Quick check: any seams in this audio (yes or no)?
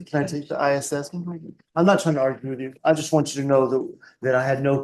no